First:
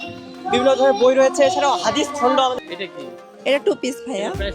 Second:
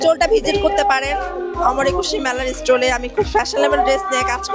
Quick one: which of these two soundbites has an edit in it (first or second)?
first